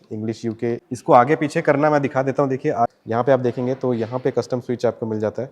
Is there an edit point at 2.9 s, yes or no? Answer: yes